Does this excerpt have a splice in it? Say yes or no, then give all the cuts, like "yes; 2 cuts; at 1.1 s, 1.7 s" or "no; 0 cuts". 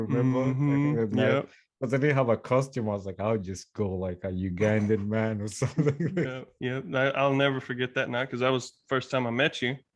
yes; 1 cut; at 6.5 s